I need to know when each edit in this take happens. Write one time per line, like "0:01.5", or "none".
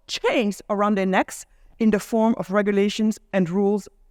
none